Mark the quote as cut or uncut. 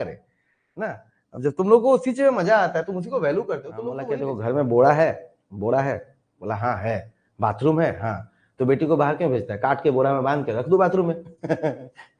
cut